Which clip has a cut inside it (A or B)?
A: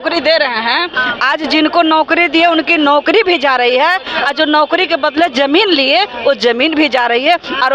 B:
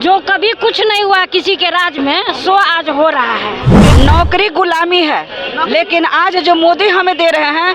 B